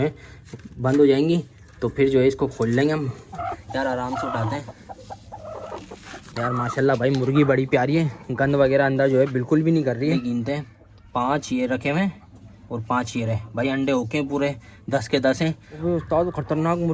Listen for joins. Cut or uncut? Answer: cut